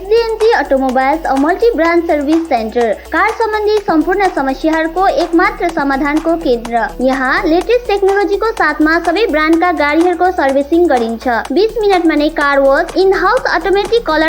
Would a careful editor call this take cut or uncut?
uncut